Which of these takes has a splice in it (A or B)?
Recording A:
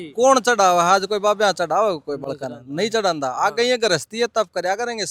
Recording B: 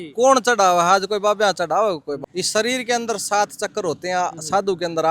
B